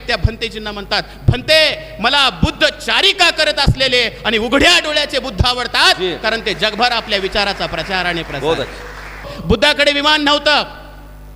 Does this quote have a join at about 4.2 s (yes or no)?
no